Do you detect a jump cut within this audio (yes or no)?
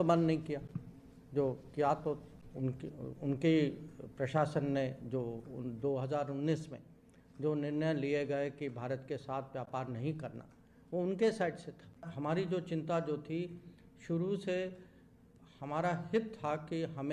no